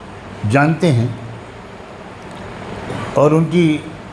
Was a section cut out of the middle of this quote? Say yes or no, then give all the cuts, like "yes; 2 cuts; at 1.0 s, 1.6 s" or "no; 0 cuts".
no; 0 cuts